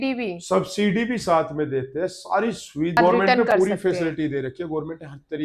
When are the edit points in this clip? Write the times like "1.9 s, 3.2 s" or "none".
3.0 s